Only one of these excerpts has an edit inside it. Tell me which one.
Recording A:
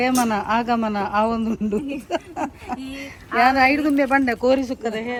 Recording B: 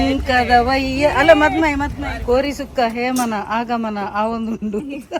B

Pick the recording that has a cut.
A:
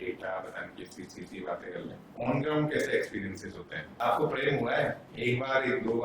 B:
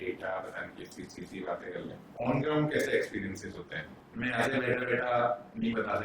A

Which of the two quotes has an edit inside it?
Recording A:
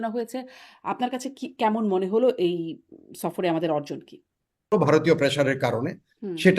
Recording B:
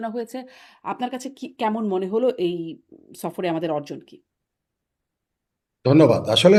A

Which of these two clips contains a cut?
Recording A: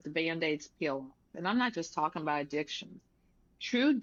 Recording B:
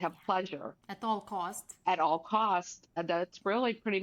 B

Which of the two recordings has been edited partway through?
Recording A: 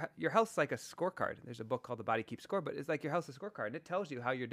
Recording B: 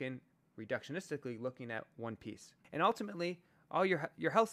B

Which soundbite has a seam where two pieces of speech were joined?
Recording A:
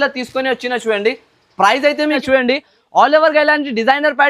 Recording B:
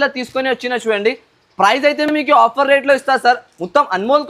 A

